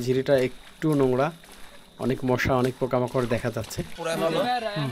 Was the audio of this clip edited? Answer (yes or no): yes